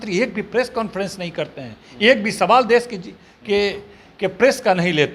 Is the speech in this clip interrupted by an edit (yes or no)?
no